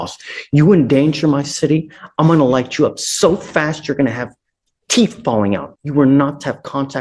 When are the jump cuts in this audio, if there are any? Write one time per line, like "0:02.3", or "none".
0:05.7